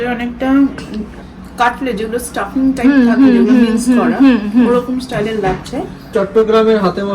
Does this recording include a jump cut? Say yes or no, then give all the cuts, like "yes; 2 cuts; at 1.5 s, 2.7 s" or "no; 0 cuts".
yes; 2 cuts; at 1.2 s, 6.1 s